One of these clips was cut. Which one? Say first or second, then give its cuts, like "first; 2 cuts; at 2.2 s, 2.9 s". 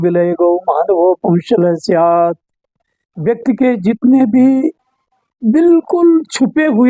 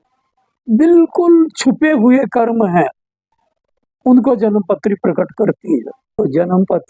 second; 1 cut; at 6.0 s